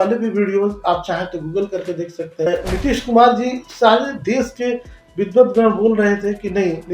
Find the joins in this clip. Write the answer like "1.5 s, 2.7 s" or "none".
2.5 s